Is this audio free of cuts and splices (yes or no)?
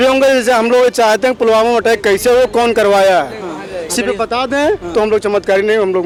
yes